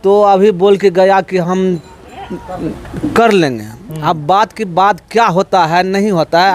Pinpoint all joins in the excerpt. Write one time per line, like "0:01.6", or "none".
none